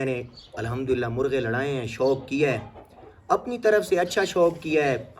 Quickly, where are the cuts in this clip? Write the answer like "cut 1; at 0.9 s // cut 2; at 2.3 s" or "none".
none